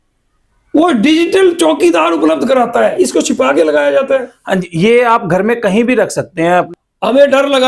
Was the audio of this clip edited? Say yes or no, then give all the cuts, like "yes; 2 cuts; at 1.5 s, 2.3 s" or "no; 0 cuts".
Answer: yes; 2 cuts; at 2.9 s, 6.7 s